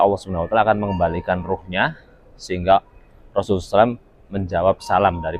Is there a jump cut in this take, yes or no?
no